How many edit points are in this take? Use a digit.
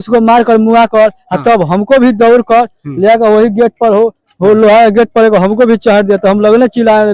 0